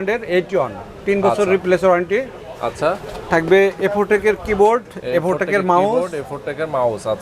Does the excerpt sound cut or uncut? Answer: uncut